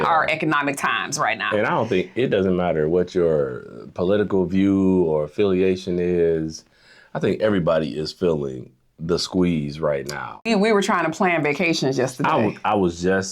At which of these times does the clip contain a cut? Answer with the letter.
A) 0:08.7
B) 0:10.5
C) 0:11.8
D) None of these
B